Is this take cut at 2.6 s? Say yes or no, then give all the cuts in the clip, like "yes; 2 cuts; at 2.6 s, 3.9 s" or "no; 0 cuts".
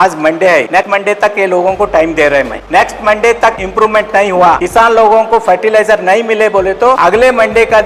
yes; 5 cuts; at 0.8 s, 2.6 s, 3.6 s, 4.6 s, 7.0 s